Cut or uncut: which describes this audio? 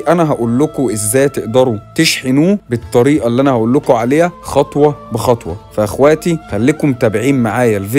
uncut